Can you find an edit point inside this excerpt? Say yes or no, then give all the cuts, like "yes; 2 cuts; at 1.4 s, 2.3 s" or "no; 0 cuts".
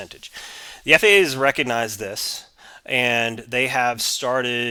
no; 0 cuts